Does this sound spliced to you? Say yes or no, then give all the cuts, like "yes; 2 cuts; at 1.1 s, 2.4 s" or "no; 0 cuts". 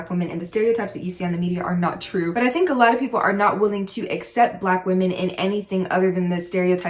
yes; 1 cut; at 2.3 s